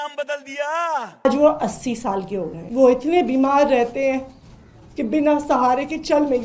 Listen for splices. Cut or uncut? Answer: cut